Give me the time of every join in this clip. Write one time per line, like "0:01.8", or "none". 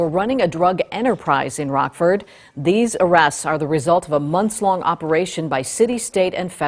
none